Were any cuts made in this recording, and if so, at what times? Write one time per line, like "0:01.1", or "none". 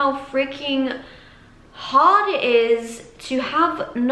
none